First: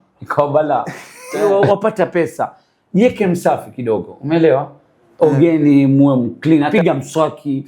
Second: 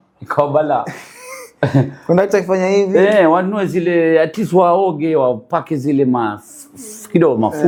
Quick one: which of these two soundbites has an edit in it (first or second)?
first